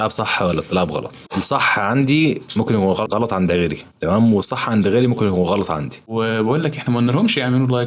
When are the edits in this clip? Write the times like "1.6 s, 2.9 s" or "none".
1.2 s, 3.0 s, 6.0 s